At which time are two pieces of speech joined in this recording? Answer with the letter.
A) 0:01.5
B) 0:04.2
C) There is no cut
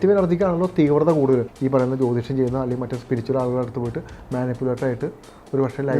A